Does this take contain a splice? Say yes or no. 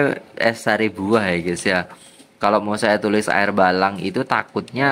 no